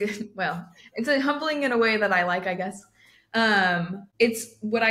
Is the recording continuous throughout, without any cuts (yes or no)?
no